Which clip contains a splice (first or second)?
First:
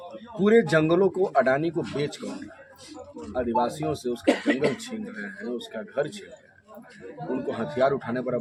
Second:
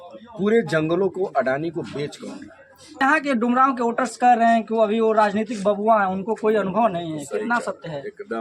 second